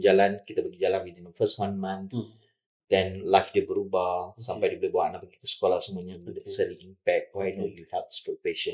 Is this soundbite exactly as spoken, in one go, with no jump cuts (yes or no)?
yes